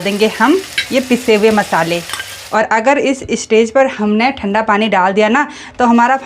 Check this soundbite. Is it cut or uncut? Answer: cut